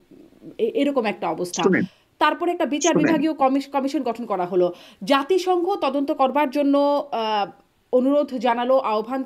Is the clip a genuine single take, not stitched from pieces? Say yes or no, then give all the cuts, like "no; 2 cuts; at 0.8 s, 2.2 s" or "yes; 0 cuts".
yes; 0 cuts